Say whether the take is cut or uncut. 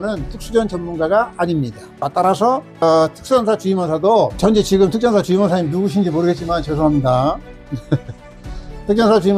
uncut